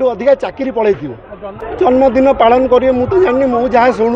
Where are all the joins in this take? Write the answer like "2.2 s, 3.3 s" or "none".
1.9 s

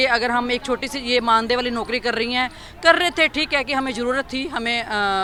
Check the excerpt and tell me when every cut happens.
none

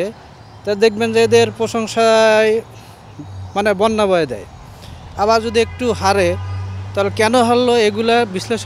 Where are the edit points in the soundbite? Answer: none

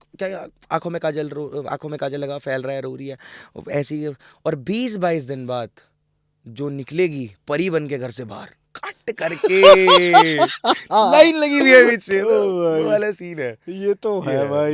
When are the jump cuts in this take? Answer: none

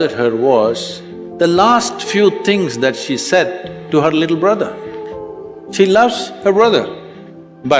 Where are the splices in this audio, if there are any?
none

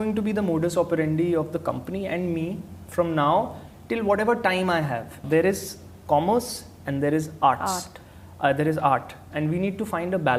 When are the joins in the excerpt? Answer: 5.2 s

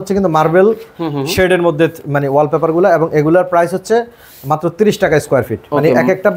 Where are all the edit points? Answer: none

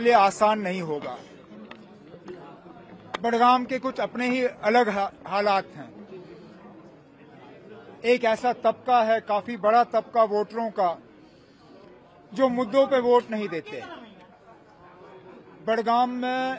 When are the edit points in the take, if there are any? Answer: none

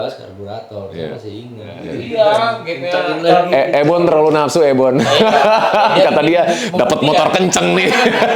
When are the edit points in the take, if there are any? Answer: 1.9 s

